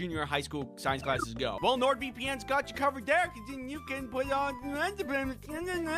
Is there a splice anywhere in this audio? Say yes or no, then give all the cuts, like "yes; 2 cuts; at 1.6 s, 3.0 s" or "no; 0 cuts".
no; 0 cuts